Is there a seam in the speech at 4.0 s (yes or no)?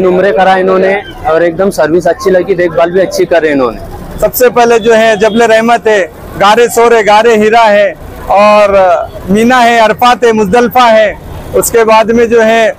yes